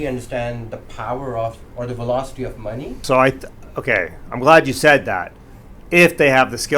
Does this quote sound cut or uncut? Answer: cut